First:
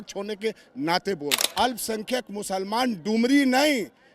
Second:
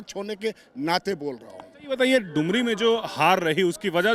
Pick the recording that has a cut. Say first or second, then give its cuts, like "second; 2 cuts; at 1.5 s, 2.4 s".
first; 1 cut; at 1.4 s